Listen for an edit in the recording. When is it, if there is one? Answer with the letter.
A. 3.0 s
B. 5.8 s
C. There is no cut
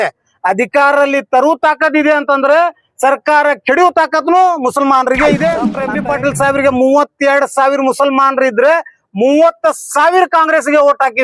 B